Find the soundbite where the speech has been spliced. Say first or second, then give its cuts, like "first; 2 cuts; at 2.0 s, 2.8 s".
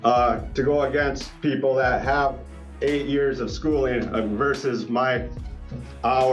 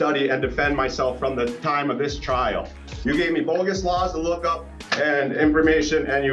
second; 1 cut; at 2.7 s